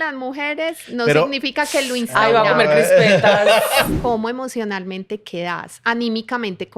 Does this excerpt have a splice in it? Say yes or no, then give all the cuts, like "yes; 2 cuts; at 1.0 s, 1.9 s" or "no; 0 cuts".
yes; 1 cut; at 3.9 s